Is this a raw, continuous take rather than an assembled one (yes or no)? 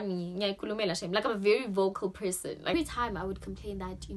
no